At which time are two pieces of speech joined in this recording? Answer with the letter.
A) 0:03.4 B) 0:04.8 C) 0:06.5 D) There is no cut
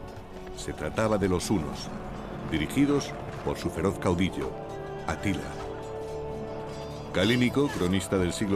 C